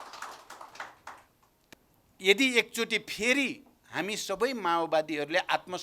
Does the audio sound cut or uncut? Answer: cut